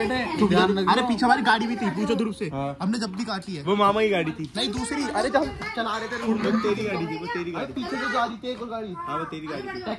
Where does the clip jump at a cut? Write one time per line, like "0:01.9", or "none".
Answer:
none